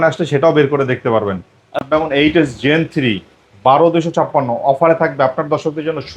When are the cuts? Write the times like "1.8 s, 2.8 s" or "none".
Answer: 1.9 s